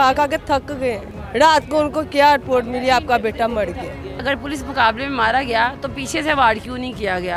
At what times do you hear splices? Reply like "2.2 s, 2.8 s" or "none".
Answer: 1.1 s, 4.2 s